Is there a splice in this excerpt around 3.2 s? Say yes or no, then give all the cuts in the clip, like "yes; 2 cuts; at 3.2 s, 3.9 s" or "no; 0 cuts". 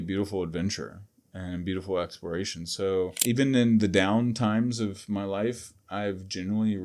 yes; 1 cut; at 3.2 s